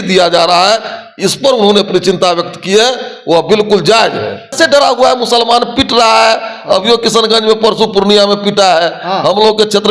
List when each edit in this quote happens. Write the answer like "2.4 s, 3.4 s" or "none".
4.6 s